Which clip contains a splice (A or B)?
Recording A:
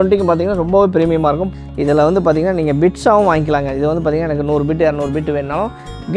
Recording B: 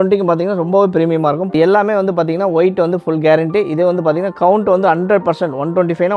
A